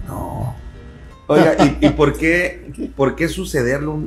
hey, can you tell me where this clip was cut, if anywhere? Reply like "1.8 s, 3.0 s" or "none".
1.0 s